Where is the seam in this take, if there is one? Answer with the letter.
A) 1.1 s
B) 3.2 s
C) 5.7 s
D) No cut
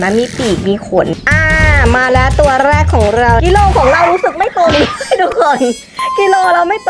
A